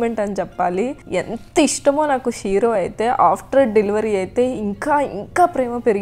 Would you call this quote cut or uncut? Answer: uncut